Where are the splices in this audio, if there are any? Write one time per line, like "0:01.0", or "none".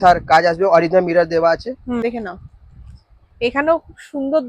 0:02.0